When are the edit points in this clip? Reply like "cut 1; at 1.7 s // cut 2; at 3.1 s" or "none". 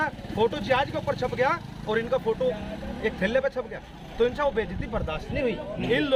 none